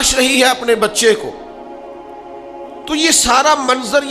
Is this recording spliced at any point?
no; 0 cuts

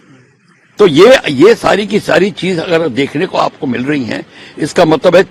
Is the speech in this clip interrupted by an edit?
no; 0 cuts

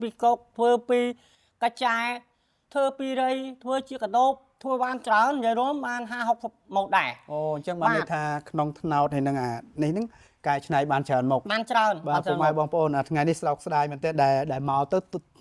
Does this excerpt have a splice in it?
no; 0 cuts

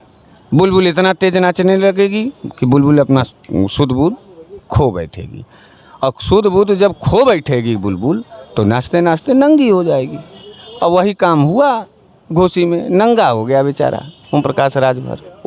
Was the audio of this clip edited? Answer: no; 0 cuts

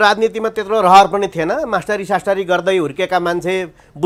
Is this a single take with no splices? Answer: yes; 0 cuts

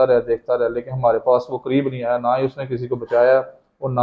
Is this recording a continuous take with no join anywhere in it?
yes; 0 cuts

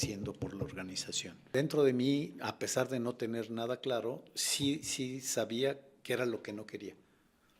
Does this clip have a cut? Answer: yes; 1 cut; at 1.5 s

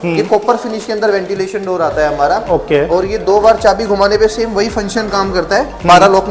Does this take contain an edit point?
no; 0 cuts

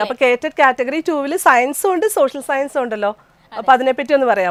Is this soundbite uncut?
yes; 0 cuts

